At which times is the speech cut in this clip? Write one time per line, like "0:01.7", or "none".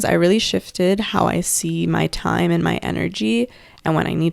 none

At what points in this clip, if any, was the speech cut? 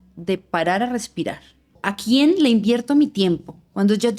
0:01.9

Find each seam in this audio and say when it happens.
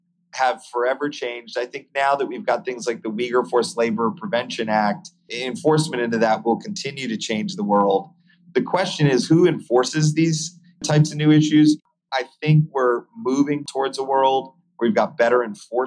0:11.8

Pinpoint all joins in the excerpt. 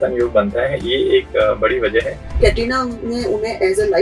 0:02.3

